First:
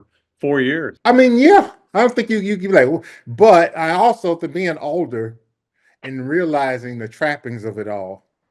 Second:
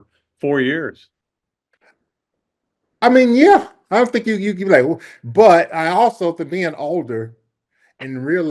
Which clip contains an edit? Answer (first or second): first